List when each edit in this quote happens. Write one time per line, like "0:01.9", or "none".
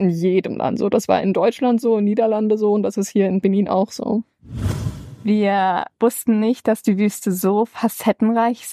0:03.4
0:04.7
0:05.9